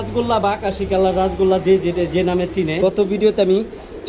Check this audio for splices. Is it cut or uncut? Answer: cut